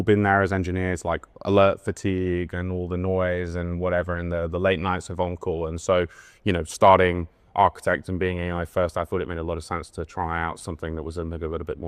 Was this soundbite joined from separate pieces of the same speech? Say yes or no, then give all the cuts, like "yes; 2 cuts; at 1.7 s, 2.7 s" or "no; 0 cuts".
no; 0 cuts